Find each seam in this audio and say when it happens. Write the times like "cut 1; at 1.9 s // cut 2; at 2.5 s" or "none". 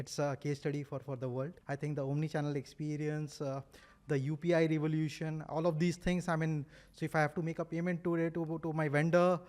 cut 1; at 1.6 s